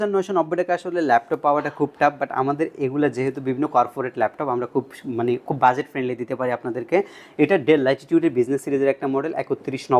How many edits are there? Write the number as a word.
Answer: zero